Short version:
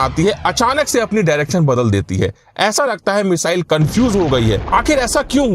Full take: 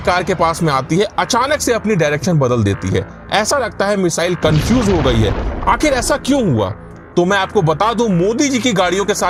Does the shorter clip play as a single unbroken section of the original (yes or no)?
no